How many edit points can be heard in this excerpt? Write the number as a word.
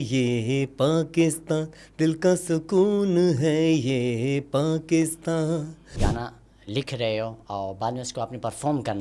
one